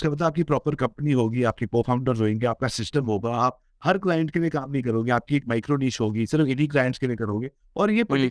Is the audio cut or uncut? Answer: uncut